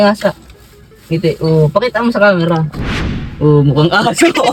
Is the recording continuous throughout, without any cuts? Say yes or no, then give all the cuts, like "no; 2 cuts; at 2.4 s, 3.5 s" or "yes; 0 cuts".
yes; 0 cuts